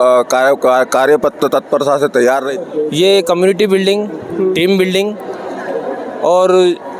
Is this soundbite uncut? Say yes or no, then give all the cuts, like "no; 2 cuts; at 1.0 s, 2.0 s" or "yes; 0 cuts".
no; 1 cut; at 2.5 s